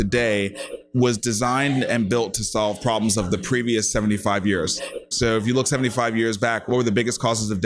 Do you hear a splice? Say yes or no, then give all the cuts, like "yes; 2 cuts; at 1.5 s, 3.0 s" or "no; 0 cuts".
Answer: yes; 2 cuts; at 5.0 s, 6.7 s